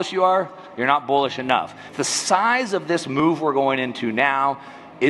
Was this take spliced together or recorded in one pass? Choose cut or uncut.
cut